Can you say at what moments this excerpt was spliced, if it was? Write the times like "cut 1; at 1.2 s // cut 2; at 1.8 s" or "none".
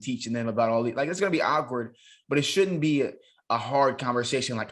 none